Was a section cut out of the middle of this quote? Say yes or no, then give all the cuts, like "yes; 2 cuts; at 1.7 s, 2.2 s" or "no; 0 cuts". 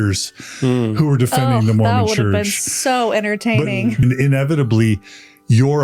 yes; 1 cut; at 4.0 s